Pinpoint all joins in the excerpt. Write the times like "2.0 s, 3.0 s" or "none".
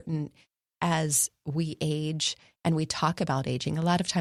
none